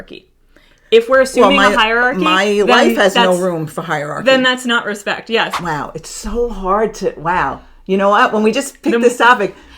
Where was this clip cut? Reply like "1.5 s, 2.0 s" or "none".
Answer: 5.6 s